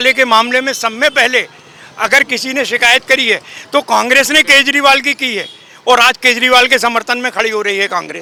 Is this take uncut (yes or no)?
yes